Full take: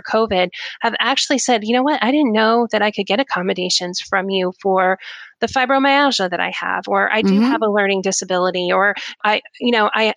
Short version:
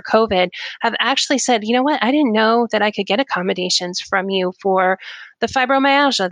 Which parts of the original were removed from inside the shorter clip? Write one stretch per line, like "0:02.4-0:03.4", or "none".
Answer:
none